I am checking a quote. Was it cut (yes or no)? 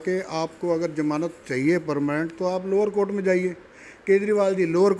no